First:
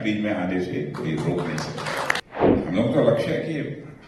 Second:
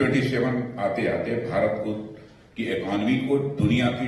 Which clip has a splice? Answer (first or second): first